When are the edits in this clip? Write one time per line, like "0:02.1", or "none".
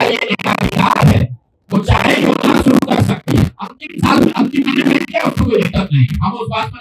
none